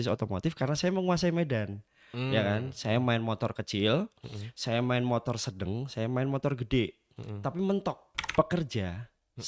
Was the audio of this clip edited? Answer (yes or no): yes